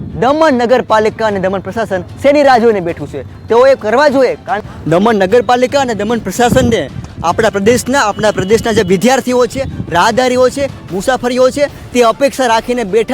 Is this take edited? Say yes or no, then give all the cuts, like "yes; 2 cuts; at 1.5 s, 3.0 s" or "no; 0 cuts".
yes; 1 cut; at 4.6 s